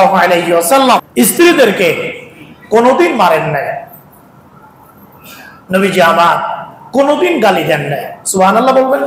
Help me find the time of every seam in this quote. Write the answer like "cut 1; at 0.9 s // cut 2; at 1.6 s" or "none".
cut 1; at 1.1 s